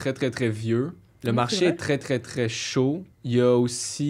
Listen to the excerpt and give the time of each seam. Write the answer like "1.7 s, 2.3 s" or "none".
1.1 s, 3.1 s